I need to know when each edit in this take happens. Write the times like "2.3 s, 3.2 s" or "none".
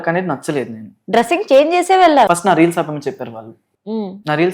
0.9 s, 2.3 s